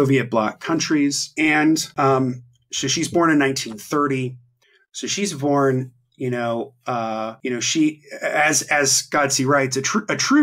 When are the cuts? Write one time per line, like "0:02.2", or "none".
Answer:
0:01.2
0:01.9
0:07.3